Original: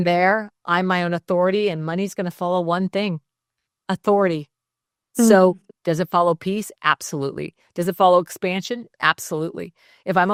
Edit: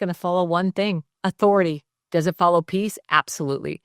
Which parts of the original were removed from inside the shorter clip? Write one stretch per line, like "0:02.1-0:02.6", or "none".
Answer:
0:03.3-0:03.7
0:04.6-0:05.7